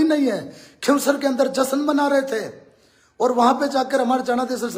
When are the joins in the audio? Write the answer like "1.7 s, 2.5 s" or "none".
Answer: none

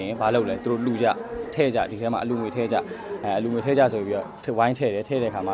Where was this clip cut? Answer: none

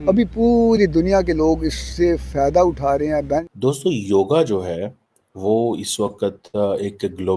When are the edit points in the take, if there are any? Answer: 3.5 s

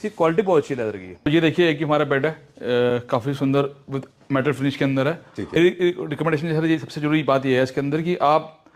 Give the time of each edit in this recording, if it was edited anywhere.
1.3 s, 5.6 s

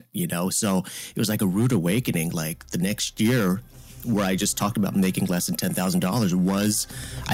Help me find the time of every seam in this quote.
none

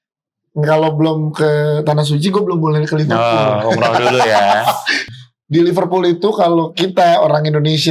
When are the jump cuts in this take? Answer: 5.0 s

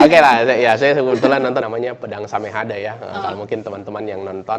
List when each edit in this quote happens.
1.6 s

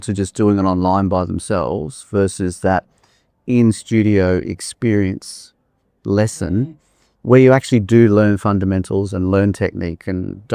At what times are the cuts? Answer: none

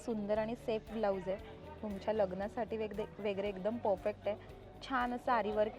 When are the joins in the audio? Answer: none

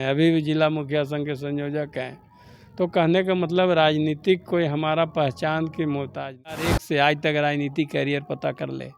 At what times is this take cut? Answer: 6.7 s

